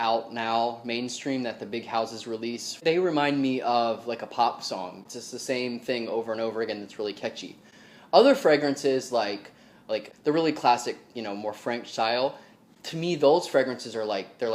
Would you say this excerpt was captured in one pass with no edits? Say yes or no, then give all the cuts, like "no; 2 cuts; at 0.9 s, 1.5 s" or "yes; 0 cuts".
no; 3 cuts; at 2.8 s, 5.0 s, 10.1 s